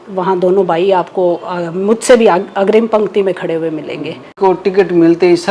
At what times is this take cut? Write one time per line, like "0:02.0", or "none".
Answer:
0:04.4